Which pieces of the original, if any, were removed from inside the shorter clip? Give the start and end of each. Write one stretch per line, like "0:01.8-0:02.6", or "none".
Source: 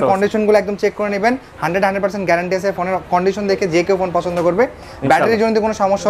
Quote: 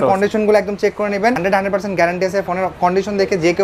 0:01.4-0:01.7